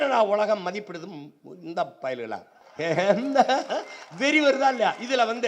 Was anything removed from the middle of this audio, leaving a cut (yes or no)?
yes